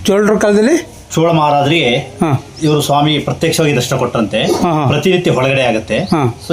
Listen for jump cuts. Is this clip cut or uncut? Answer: uncut